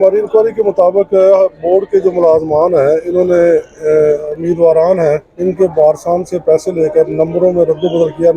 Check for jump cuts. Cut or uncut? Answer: cut